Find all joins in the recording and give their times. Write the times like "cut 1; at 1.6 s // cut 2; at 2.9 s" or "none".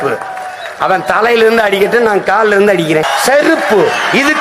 cut 1; at 3.1 s